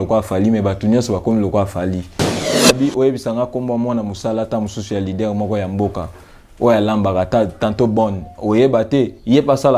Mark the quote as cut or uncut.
cut